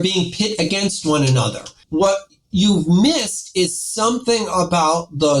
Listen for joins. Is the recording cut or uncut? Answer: cut